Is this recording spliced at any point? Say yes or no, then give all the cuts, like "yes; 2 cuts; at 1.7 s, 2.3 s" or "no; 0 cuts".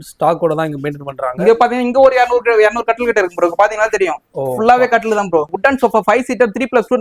yes; 1 cut; at 5.5 s